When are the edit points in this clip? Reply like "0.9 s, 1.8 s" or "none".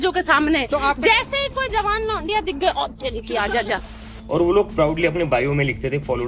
3.9 s